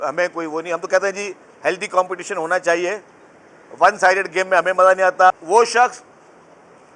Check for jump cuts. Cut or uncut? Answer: cut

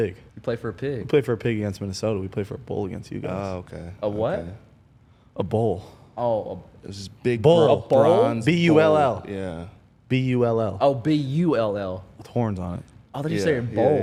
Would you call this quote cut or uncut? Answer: uncut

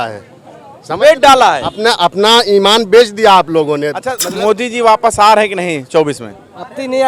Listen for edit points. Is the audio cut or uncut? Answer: cut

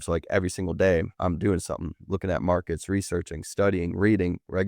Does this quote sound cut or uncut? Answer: cut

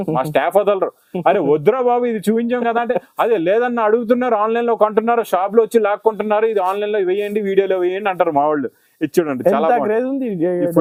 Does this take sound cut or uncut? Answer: uncut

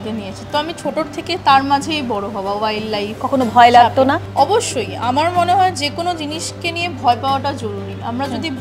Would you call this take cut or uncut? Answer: cut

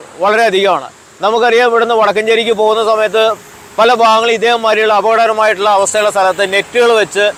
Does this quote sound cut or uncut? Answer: uncut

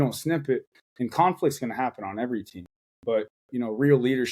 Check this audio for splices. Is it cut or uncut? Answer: uncut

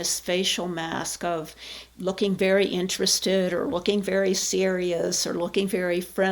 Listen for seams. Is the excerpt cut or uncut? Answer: uncut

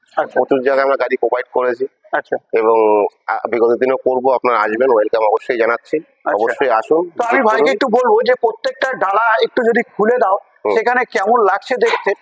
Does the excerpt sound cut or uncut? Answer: uncut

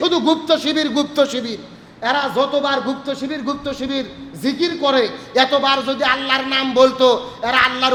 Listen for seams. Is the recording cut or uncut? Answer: uncut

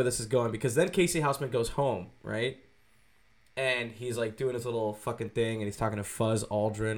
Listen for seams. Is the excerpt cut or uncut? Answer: uncut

